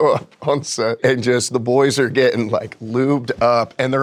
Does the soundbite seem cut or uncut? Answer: uncut